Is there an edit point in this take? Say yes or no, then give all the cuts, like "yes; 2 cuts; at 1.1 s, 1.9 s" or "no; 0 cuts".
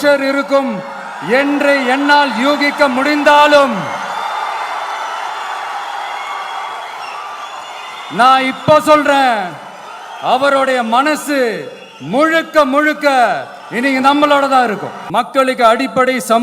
yes; 1 cut; at 14.9 s